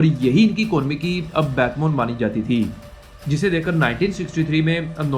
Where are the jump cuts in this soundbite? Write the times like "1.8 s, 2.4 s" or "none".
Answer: 3.1 s